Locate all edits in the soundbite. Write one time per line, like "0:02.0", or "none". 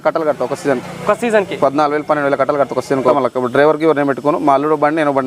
0:03.0